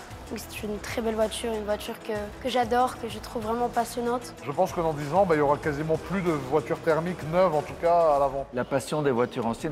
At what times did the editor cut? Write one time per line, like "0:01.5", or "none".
0:02.3
0:04.4
0:08.5